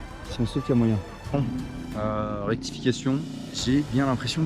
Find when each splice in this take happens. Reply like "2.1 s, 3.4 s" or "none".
1.3 s, 3.4 s